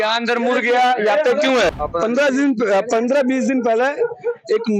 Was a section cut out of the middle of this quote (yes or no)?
yes